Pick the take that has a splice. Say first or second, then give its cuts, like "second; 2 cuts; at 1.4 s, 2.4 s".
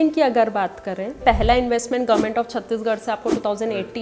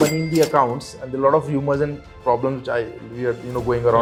first; 1 cut; at 1.2 s